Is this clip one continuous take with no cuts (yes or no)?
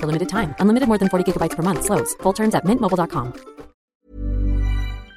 no